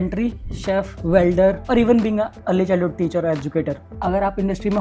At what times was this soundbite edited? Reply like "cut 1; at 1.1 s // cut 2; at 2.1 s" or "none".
cut 1; at 0.9 s // cut 2; at 1.6 s // cut 3; at 2.4 s // cut 4; at 3.8 s